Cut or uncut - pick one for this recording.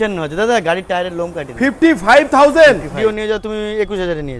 cut